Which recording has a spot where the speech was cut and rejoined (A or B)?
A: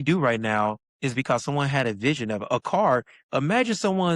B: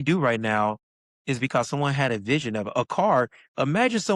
A